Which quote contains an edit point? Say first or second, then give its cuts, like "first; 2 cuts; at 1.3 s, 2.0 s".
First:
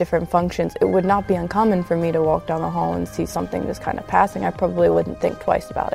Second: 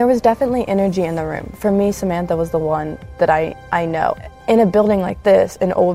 second; 1 cut; at 4.2 s